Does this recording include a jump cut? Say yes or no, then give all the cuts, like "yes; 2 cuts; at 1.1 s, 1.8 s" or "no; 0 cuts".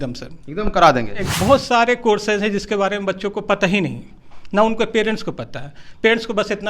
yes; 1 cut; at 1.2 s